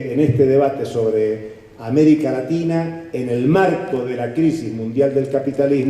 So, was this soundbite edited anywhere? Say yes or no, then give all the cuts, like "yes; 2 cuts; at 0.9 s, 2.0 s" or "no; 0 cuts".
yes; 1 cut; at 2.3 s